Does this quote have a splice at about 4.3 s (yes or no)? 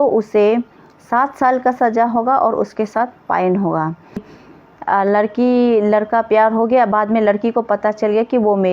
yes